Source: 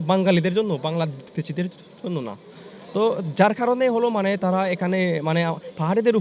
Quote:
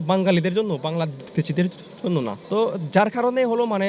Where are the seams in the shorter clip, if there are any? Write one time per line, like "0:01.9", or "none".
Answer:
0:02.4